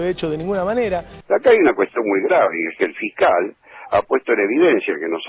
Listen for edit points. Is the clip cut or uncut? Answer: cut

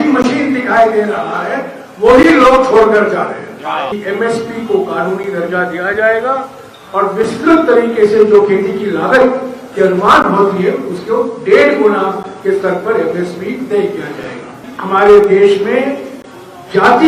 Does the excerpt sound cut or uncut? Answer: cut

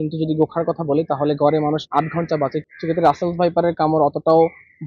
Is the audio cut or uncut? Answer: cut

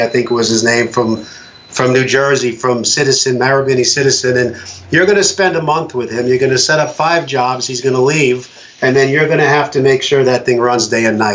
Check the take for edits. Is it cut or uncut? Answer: uncut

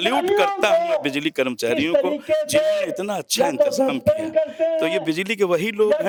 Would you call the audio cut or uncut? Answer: uncut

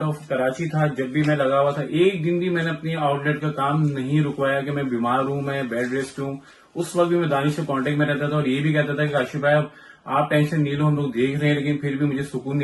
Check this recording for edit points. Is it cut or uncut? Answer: uncut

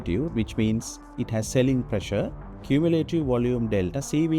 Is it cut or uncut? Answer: cut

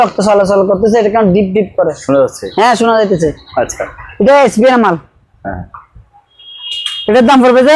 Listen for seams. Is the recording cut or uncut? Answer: uncut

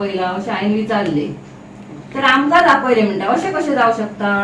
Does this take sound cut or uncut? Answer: uncut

